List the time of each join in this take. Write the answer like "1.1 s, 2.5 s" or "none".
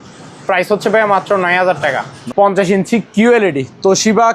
2.1 s